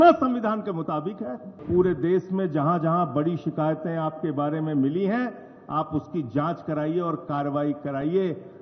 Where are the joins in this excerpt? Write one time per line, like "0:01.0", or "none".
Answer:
0:01.6